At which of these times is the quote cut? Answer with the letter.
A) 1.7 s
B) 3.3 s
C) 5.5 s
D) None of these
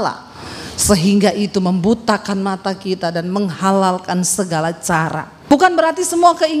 C